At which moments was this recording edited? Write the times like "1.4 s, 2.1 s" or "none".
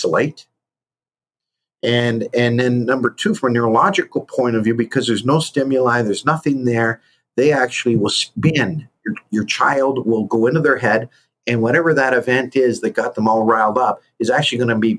none